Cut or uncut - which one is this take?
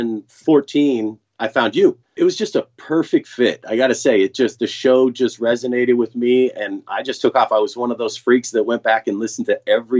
cut